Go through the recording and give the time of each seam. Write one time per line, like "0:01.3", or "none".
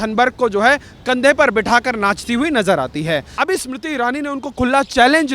0:03.3